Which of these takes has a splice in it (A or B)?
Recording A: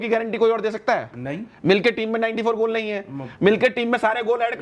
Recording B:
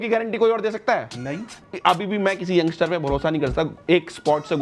B